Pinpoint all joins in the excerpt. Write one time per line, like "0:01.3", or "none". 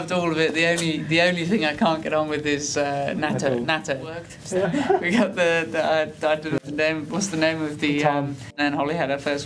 0:04.3
0:08.4